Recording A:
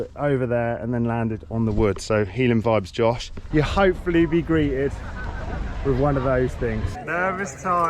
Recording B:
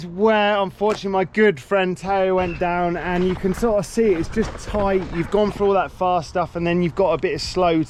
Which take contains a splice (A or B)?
A